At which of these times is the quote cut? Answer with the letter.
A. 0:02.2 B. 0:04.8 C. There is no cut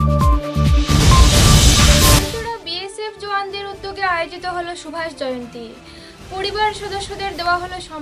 A